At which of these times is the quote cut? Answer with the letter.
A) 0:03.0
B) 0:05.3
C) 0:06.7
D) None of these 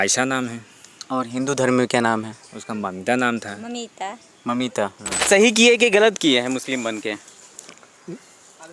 B